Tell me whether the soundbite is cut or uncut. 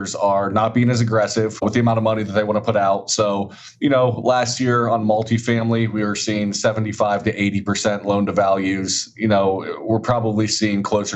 uncut